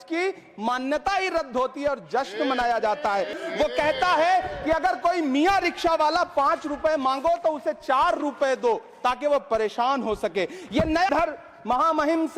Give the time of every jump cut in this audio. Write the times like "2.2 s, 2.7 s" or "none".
3.3 s, 11.1 s